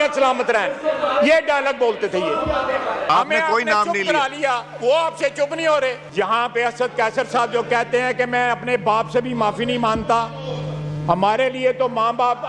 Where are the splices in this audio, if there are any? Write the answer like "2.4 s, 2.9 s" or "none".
3.1 s, 6.0 s